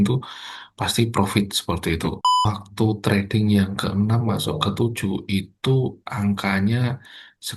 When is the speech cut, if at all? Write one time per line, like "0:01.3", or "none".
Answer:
0:02.3